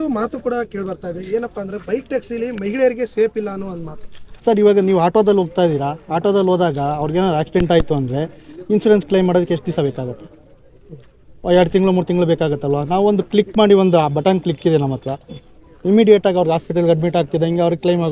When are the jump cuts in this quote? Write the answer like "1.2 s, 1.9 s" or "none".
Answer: none